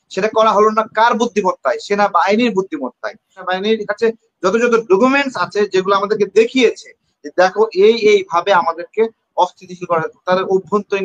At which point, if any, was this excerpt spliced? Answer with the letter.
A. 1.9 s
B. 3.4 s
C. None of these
B